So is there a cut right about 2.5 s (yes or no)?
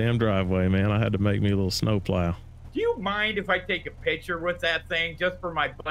yes